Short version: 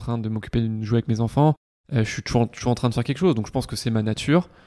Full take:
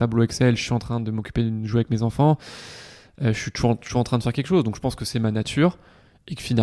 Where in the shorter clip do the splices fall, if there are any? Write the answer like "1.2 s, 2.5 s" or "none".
1.7 s